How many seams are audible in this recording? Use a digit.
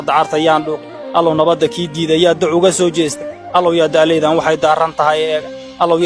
0